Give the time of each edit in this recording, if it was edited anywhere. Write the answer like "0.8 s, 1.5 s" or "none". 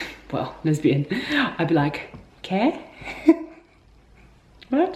none